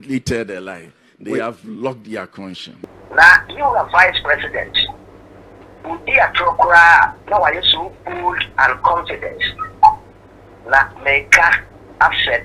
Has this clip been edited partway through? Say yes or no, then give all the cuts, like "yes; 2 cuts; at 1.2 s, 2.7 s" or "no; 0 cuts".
yes; 1 cut; at 2.8 s